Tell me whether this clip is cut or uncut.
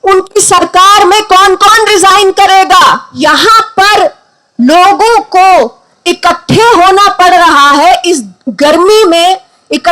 cut